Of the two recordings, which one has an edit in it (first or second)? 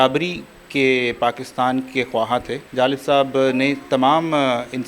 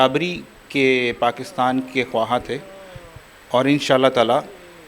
first